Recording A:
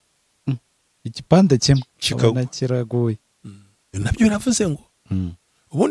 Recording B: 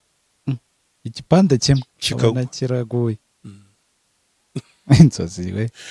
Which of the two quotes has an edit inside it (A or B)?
A